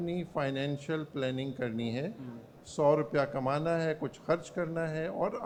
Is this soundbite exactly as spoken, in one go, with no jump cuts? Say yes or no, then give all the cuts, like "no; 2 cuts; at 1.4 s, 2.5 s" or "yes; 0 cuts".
yes; 0 cuts